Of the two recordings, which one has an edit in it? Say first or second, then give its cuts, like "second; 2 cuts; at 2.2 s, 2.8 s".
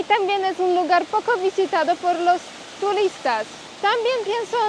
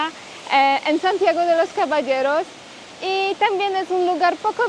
first; 1 cut; at 3.6 s